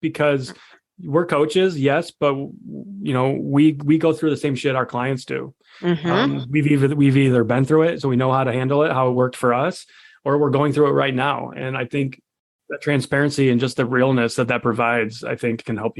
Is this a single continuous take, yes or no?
yes